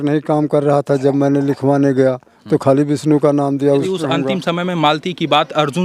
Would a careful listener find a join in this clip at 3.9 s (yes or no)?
yes